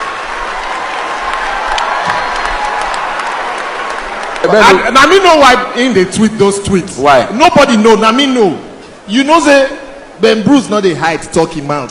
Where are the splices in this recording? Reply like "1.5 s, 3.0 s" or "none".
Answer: 4.5 s